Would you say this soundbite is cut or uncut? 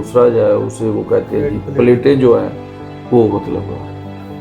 uncut